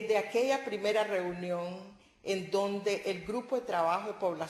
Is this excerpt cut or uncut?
uncut